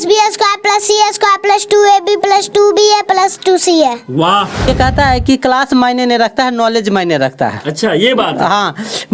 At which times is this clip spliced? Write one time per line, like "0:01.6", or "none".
0:04.7